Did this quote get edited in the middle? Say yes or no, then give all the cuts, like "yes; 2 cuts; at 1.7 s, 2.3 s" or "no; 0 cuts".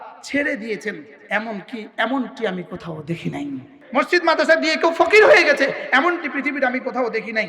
yes; 2 cuts; at 1.1 s, 3.8 s